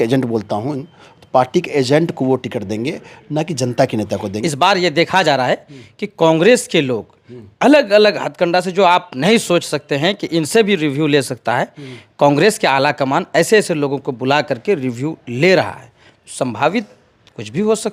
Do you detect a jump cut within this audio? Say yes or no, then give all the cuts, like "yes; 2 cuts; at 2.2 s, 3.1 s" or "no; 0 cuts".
no; 0 cuts